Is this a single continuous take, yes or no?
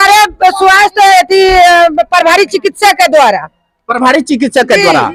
yes